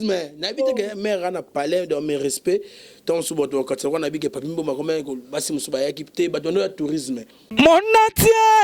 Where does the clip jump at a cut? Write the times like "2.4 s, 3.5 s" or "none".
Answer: 7.4 s